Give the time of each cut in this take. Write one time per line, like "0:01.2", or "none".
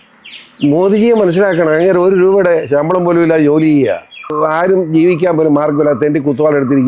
0:04.3